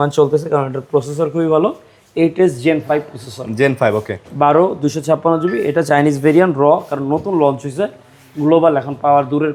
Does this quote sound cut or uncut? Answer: uncut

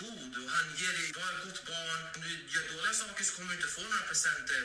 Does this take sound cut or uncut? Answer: uncut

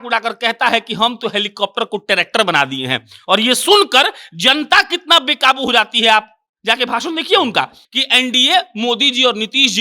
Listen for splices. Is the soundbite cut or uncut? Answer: cut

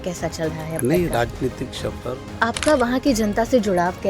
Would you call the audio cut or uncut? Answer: cut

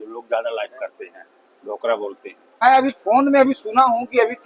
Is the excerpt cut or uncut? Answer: cut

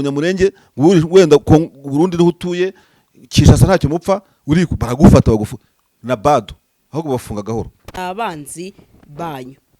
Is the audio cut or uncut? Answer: cut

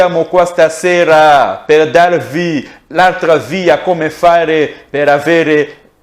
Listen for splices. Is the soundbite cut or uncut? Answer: uncut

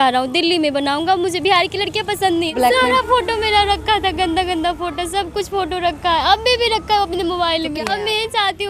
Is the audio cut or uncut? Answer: cut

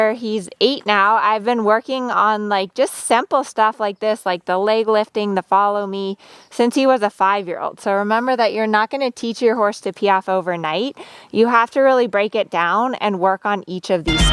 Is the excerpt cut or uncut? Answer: uncut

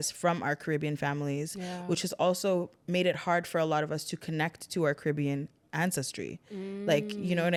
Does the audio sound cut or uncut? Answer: uncut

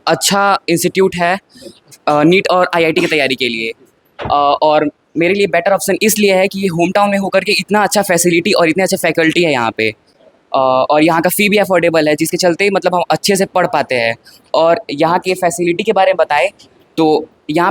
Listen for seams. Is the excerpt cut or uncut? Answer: uncut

